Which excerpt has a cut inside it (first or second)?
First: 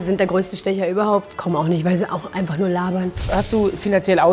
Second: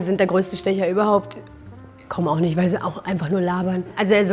first